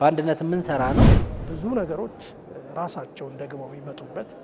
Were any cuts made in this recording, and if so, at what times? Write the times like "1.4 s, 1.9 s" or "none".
1.0 s